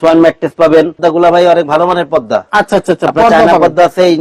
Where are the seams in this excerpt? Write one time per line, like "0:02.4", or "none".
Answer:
0:01.0

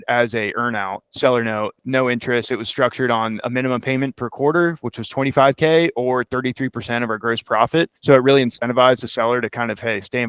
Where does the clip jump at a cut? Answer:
0:01.0
0:01.8
0:07.9

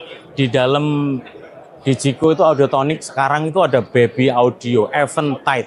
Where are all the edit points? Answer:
none

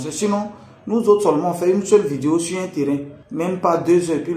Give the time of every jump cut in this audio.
0:03.2

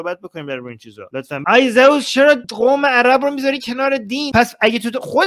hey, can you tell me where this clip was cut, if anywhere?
0:01.4
0:02.5
0:04.3

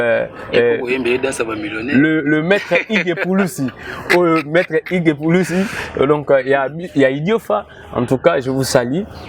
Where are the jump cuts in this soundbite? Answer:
none

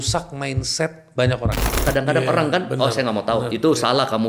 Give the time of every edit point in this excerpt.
0:01.8

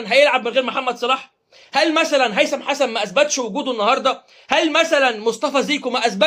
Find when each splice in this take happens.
none

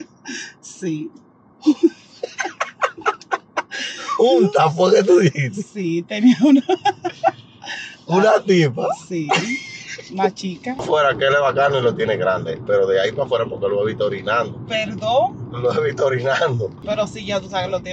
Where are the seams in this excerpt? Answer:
0:10.8
0:16.8

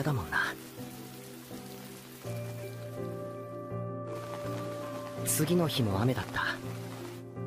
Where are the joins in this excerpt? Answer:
none

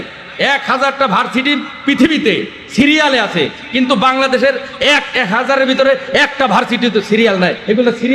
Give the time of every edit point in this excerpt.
none

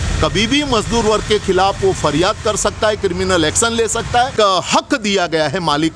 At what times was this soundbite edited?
0:04.3

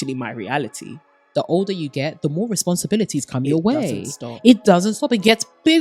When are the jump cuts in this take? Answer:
0:01.2

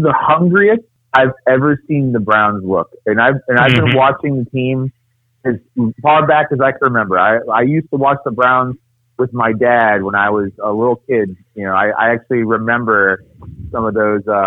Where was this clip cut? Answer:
0:01.0

